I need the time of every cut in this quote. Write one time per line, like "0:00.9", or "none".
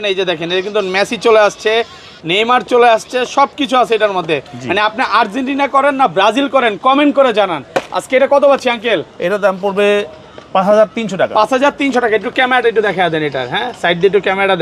none